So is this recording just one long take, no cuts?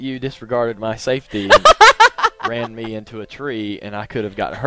yes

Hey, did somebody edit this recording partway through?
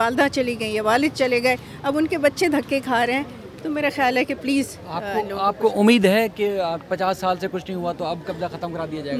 no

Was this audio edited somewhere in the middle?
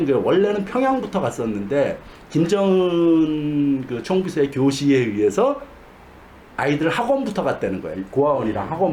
no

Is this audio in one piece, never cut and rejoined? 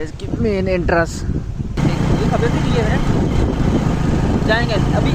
no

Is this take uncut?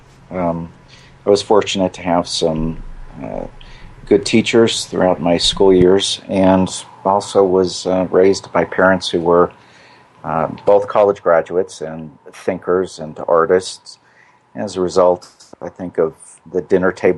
no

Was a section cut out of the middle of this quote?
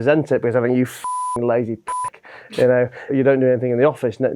yes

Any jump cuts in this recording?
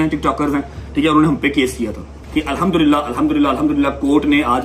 yes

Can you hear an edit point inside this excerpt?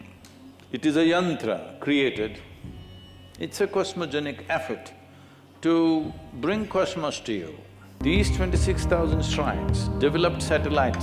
yes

